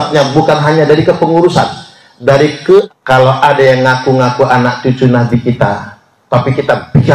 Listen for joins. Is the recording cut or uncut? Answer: cut